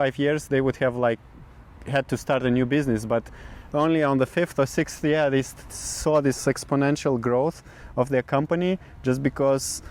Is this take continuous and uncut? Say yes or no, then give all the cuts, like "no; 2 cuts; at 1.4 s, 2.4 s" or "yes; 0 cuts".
yes; 0 cuts